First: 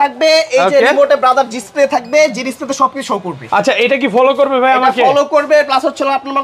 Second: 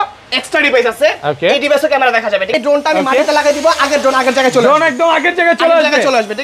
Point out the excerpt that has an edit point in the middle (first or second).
second